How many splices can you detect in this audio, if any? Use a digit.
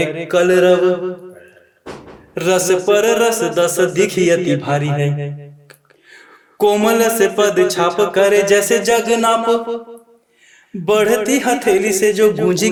0